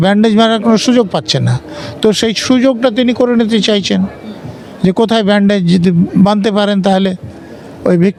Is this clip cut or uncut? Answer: uncut